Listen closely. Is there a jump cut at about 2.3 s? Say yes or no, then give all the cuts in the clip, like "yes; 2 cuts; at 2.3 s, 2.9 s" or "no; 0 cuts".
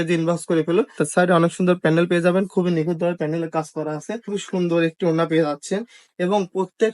no; 2 cuts; at 1.0 s, 4.3 s